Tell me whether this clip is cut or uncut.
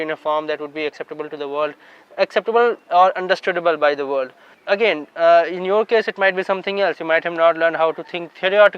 cut